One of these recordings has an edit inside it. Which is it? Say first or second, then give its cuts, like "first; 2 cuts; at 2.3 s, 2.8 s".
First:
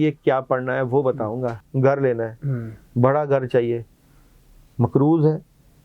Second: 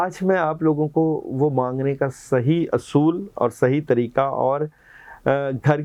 first; 1 cut; at 1.6 s